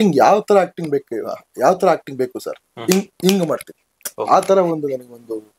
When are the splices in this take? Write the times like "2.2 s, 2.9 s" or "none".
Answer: none